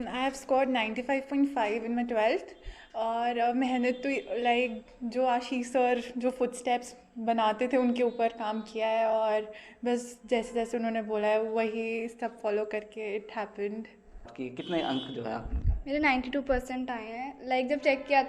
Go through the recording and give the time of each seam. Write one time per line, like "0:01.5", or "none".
0:14.4